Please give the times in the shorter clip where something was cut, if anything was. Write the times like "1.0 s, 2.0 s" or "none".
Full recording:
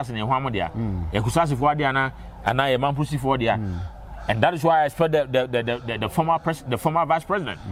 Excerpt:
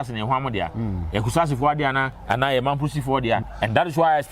2.1 s, 3.5 s